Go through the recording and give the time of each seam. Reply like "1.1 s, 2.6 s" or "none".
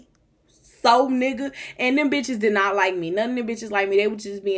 none